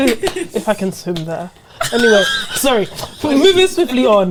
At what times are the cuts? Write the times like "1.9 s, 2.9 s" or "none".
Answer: none